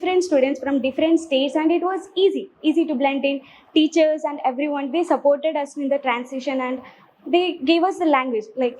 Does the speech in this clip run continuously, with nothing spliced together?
yes; 0 cuts

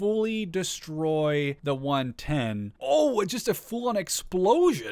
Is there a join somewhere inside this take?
yes; 2 cuts; at 1.6 s, 2.8 s

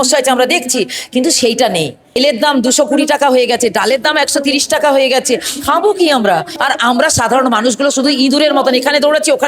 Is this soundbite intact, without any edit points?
no; 2 cuts; at 2.2 s, 6.5 s

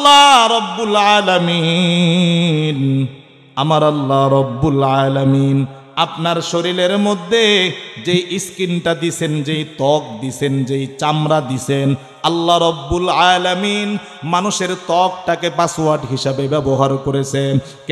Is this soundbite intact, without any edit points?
yes; 0 cuts

